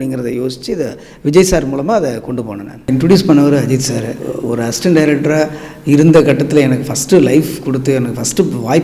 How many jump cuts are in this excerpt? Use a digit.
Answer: 2